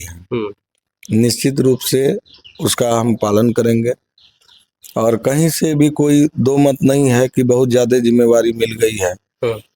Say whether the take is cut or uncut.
uncut